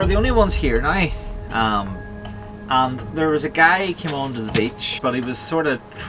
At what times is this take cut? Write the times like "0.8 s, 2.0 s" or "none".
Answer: 4.9 s